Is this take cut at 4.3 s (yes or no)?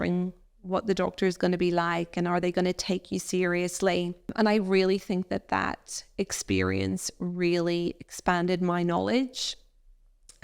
yes